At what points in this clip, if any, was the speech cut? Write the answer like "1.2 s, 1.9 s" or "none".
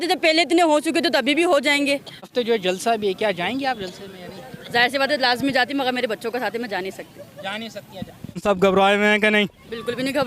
2.3 s, 8.4 s

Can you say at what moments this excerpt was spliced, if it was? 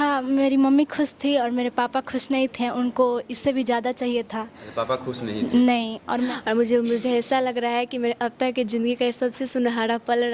6.1 s

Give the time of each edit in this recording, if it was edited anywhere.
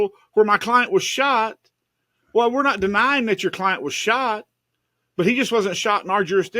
none

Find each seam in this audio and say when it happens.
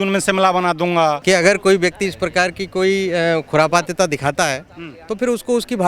1.2 s

